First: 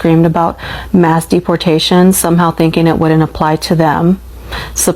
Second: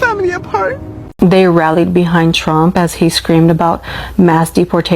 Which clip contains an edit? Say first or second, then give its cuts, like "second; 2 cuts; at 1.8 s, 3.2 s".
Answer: second; 1 cut; at 1.0 s